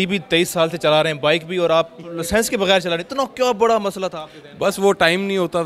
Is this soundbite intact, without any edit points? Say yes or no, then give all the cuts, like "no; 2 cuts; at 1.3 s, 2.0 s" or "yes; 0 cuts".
yes; 0 cuts